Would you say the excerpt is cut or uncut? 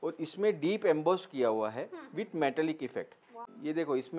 cut